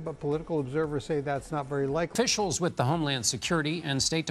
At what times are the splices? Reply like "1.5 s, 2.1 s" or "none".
2.1 s